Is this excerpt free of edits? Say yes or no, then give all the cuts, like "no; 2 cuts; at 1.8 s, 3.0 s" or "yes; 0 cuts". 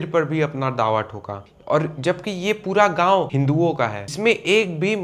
no; 1 cut; at 3.8 s